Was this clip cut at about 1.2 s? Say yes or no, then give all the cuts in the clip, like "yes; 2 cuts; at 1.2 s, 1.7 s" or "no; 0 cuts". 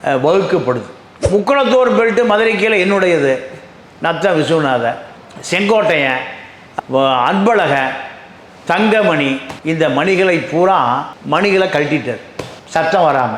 yes; 1 cut; at 1.2 s